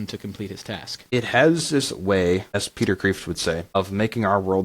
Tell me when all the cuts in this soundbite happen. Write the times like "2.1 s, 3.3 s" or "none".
1.1 s, 2.7 s, 3.8 s